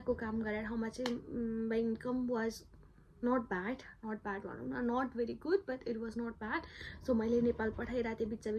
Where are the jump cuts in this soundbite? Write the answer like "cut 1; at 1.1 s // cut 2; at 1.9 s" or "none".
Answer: none